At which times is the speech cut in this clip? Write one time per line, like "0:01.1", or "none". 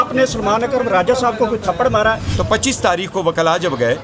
0:02.3

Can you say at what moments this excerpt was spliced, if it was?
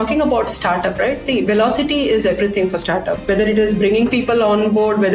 0:03.1

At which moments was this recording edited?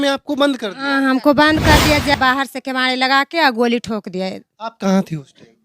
0:02.1

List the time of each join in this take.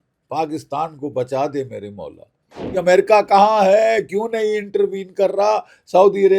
0:02.7

